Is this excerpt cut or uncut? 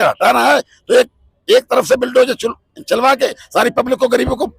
uncut